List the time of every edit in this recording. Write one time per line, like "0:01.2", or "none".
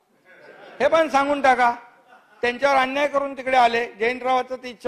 none